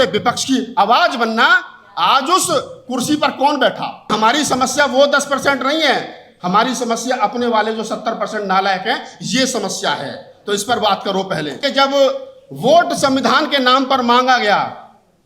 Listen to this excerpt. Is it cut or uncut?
cut